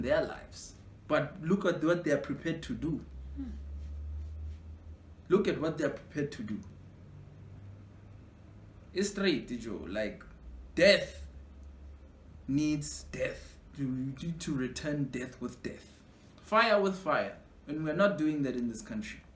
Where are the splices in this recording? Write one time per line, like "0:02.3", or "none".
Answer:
none